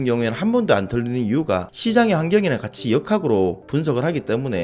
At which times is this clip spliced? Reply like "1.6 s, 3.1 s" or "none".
none